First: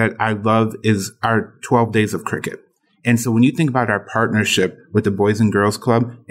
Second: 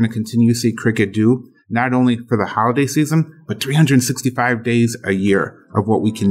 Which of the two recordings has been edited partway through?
first; 1 cut; at 1.1 s

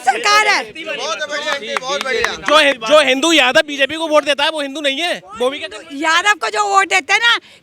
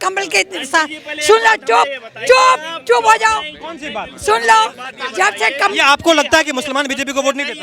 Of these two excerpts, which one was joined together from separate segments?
first; 1 cut; at 2.7 s

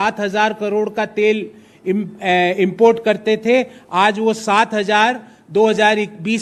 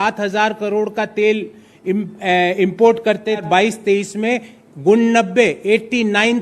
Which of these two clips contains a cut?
second; 1 cut; at 3.4 s

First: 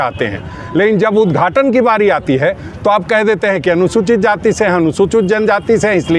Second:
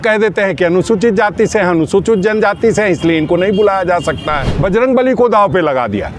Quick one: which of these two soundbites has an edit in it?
second; 1 cut; at 4.5 s

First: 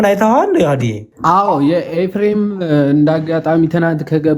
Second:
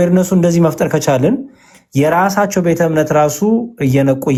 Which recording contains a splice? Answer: first; 1 cut; at 1.1 s

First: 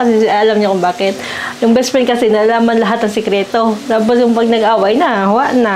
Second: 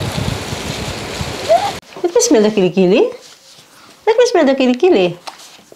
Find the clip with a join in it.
second; 1 cut; at 1.9 s

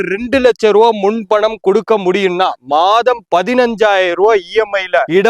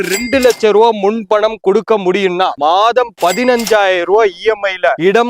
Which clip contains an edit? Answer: second; 1 cut; at 2.5 s

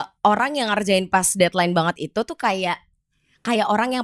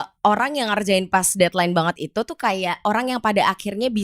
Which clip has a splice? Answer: second; 1 cut; at 2.8 s

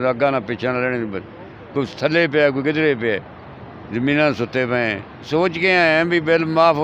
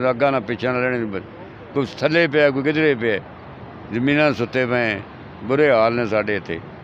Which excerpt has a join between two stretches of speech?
first; 1 cut; at 5.3 s

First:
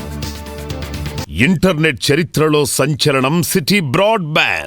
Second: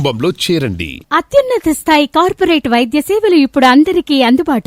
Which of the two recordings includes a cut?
first; 1 cut; at 1.2 s

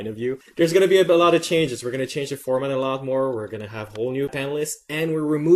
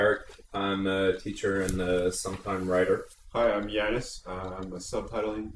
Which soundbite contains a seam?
second; 1 cut; at 3.7 s

